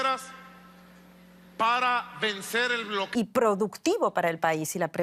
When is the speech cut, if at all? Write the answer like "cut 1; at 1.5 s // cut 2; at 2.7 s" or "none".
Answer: none